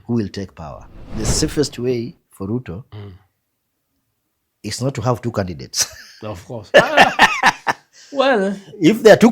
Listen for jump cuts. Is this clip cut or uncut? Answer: cut